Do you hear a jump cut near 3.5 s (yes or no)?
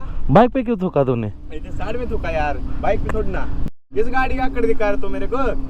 yes